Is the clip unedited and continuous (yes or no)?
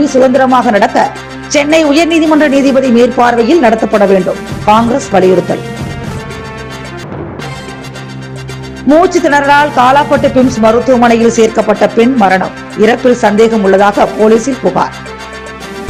yes